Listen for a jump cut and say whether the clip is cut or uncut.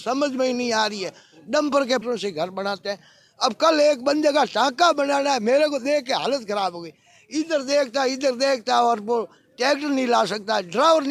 cut